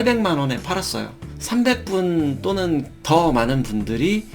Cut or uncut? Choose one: cut